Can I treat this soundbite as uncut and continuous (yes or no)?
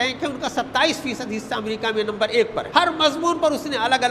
no